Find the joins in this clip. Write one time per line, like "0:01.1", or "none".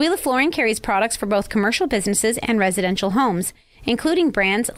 none